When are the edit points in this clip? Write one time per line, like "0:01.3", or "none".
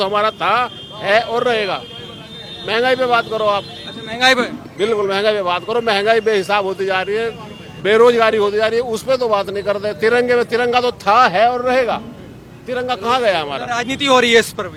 none